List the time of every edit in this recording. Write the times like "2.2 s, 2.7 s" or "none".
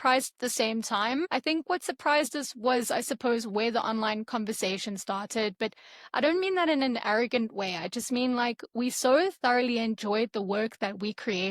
1.3 s